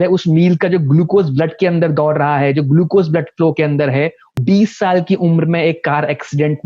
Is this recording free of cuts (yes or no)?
no